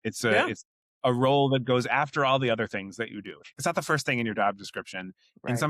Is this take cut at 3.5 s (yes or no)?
yes